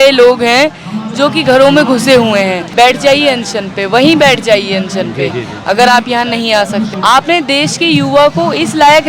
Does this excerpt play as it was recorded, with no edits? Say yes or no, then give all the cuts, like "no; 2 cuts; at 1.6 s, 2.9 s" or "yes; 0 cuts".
no; 2 cuts; at 2.6 s, 6.9 s